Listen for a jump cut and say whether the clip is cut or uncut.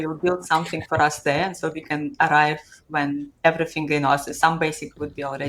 uncut